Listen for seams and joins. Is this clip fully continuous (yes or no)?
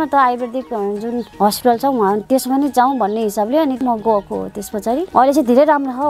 no